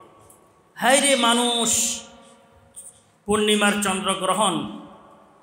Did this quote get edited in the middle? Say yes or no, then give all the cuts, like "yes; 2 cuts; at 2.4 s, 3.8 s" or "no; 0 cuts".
no; 0 cuts